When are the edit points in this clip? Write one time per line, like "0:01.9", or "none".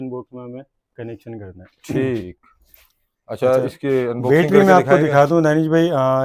none

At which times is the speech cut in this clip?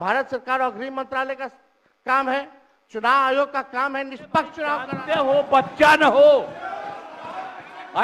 0:04.9

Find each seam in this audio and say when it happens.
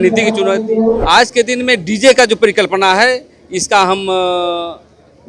0:01.0

